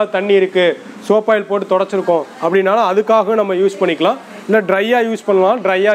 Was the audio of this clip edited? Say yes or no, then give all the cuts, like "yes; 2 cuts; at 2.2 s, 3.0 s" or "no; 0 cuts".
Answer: no; 0 cuts